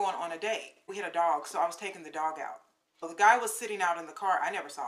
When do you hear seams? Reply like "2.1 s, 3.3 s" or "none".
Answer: 0.9 s, 3.1 s